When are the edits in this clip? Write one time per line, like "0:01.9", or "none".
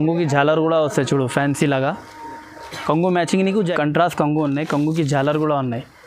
0:03.7

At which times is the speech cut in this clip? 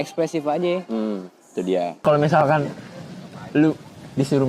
0:02.0

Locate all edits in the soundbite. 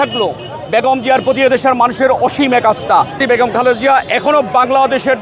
0:03.1

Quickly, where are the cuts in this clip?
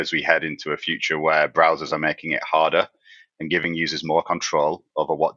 none

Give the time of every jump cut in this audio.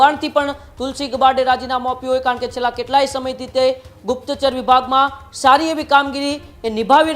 none

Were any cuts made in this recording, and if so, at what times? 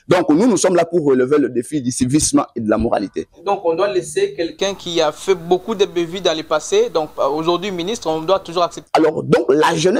0:03.4
0:08.8

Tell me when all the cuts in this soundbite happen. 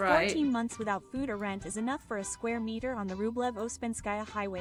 none

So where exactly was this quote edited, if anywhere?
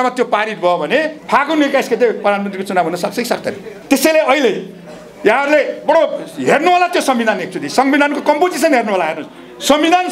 0:01.2
0:03.7

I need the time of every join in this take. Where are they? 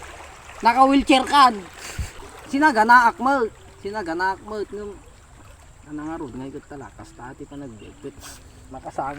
0:02.2

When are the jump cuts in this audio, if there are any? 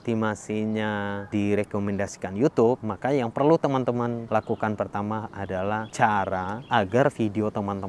0:01.3
0:02.9
0:04.2
0:05.6
0:06.6

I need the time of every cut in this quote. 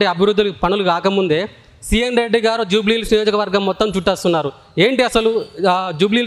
none

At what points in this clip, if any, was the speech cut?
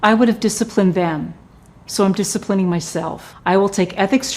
0:03.2

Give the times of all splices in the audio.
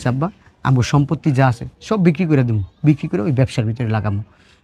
none

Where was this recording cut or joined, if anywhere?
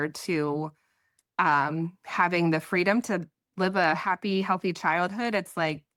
none

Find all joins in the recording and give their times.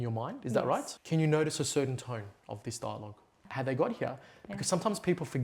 0:00.9
0:03.4

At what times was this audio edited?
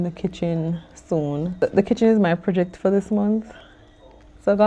0:01.6

